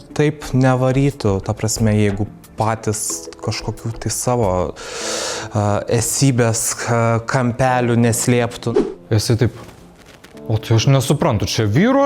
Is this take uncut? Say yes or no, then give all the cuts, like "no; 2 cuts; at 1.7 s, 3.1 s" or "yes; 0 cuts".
no; 1 cut; at 8.6 s